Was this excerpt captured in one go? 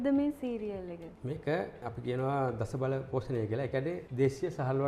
yes; 0 cuts

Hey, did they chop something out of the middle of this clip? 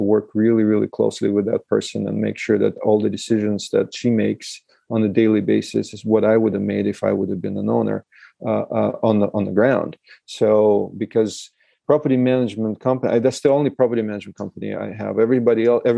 no; 0 cuts

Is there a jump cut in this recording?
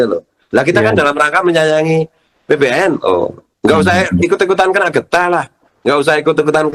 no; 0 cuts

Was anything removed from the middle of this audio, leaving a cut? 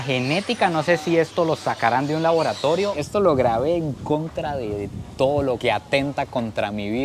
yes; 1 cut; at 2.9 s

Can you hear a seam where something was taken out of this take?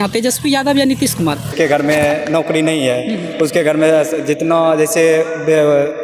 yes; 1 cut; at 1.5 s

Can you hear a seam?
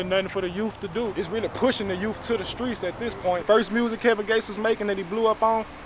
yes; 1 cut; at 3.4 s

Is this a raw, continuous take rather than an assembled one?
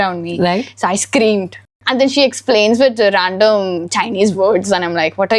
no; 1 cut; at 1.8 s

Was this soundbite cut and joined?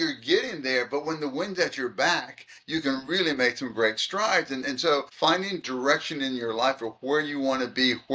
yes; 1 cut; at 5.1 s

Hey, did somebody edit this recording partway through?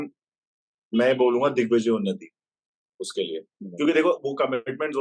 no; 0 cuts

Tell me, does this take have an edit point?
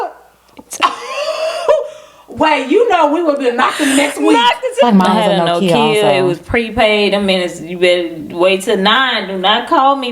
yes; 1 cut; at 4.8 s

